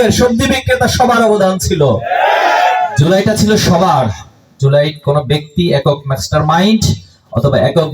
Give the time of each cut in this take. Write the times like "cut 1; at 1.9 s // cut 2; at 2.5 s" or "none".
cut 1; at 3.0 s